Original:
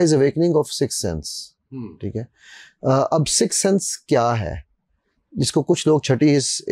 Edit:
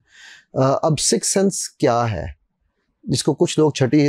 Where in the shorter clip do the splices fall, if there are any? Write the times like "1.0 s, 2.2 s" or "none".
none